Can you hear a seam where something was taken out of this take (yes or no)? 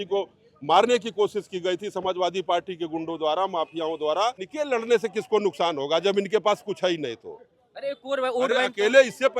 yes